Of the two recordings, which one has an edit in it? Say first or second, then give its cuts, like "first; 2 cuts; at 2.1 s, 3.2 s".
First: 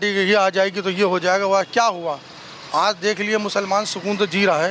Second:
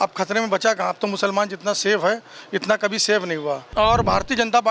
second; 1 cut; at 3.7 s